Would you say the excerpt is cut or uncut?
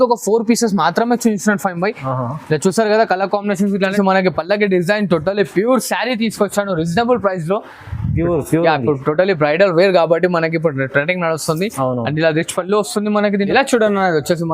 cut